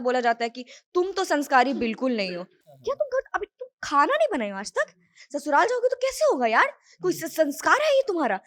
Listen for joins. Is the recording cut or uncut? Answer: uncut